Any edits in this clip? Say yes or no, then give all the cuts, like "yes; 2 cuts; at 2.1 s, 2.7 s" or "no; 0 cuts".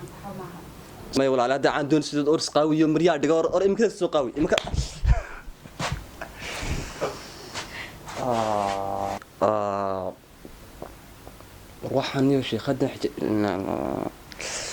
yes; 2 cuts; at 1.2 s, 9.2 s